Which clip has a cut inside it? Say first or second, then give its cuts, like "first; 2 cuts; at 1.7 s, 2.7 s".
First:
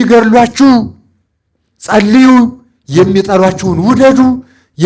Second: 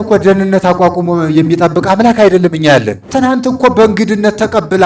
second; 1 cut; at 3.0 s